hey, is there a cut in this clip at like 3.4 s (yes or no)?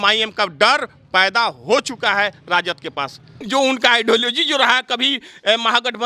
yes